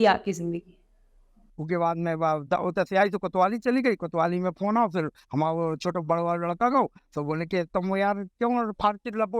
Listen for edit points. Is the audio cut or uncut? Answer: cut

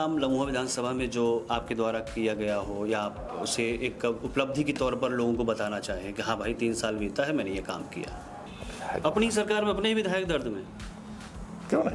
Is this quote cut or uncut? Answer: cut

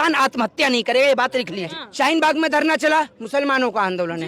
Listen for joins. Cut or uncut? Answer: cut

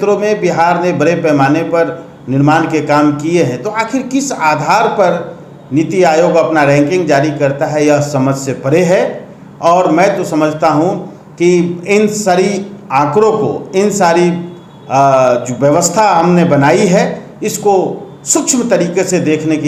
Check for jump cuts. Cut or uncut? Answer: uncut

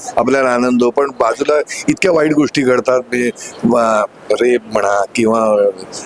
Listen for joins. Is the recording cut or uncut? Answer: uncut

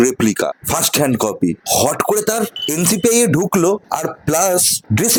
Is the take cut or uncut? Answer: uncut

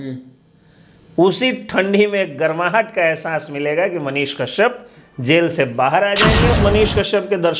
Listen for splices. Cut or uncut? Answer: cut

